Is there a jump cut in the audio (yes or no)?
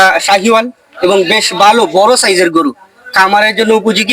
no